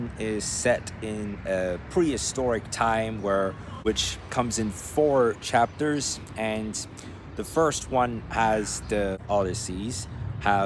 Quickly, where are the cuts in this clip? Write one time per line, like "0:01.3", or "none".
0:03.7
0:09.2